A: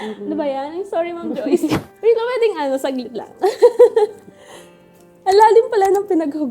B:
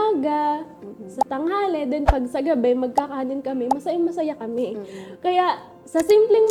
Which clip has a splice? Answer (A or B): A